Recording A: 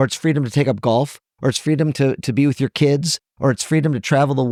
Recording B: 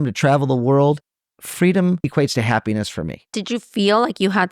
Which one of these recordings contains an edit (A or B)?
B